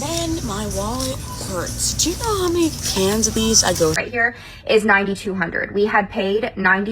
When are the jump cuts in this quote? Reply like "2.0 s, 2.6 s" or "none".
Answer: 4.0 s